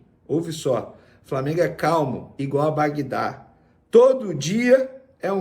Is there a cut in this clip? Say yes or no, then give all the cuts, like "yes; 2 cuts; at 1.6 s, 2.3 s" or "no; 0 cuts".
no; 0 cuts